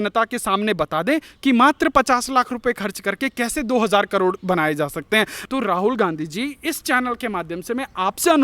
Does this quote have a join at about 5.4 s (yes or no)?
yes